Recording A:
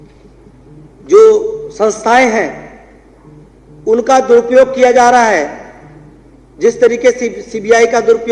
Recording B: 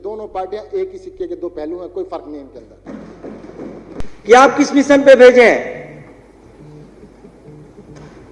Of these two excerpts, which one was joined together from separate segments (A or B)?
B